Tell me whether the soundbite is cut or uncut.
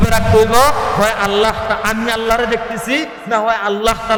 uncut